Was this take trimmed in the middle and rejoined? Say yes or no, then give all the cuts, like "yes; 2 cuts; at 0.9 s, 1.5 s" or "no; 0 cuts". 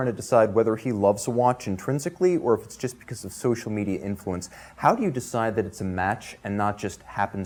no; 0 cuts